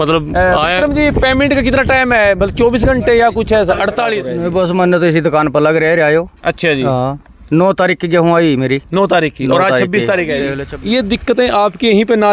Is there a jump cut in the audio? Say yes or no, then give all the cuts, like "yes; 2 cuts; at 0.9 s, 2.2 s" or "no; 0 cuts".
yes; 2 cuts; at 4.3 s, 10.6 s